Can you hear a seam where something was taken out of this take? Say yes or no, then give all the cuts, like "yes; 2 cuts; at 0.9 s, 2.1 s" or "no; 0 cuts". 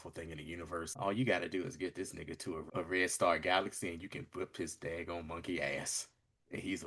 yes; 2 cuts; at 0.9 s, 2.6 s